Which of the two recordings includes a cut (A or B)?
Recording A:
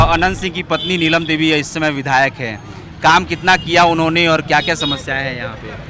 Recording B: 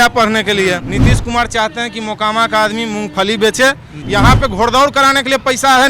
B